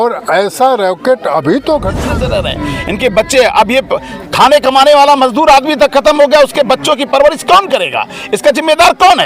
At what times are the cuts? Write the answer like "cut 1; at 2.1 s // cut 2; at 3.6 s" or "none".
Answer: cut 1; at 2.1 s